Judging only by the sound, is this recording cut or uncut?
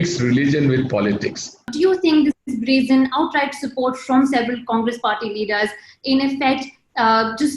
cut